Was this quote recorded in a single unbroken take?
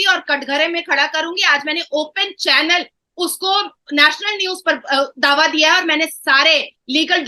yes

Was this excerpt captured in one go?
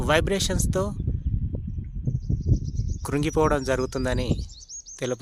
yes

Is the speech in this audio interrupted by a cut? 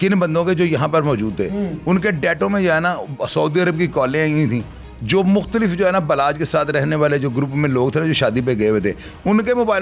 no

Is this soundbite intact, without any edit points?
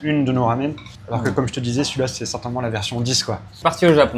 yes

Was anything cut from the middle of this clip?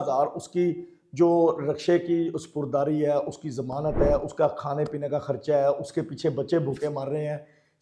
no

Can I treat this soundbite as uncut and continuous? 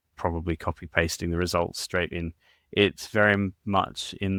yes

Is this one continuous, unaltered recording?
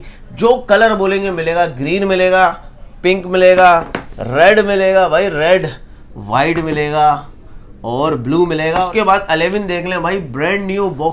no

